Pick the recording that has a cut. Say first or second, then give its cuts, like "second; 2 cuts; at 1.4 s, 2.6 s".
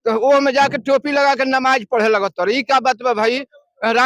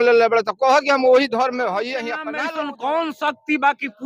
second; 1 cut; at 2.3 s